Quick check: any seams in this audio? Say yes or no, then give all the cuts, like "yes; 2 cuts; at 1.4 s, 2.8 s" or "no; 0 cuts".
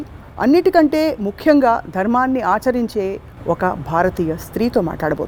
no; 0 cuts